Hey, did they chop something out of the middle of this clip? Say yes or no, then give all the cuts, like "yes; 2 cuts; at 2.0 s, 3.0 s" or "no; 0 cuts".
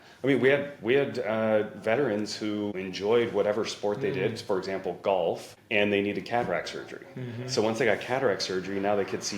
yes; 2 cuts; at 2.8 s, 5.5 s